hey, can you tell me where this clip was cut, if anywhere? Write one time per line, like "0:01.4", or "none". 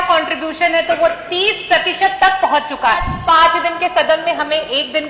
0:03.1